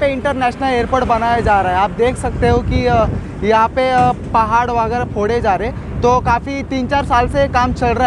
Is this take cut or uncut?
uncut